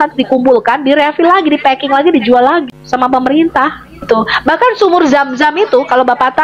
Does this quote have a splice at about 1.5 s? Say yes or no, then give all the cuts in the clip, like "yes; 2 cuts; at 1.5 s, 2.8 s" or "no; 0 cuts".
no; 2 cuts; at 2.7 s, 4.0 s